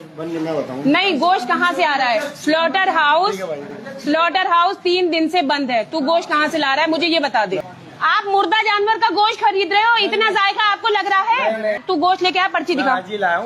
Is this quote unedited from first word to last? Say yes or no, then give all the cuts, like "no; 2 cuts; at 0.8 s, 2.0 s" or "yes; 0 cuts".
no; 2 cuts; at 7.8 s, 11.8 s